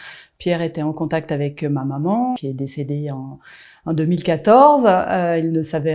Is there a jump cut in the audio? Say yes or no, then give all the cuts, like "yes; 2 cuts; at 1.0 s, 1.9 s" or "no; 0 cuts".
yes; 1 cut; at 2.4 s